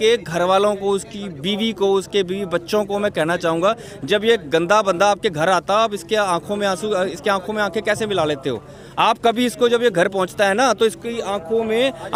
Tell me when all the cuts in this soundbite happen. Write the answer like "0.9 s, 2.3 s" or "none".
none